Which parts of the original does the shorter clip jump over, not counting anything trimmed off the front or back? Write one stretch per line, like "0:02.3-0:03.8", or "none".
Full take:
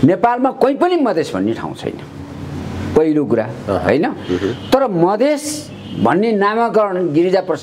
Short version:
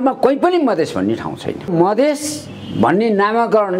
0:02.1-0:04.9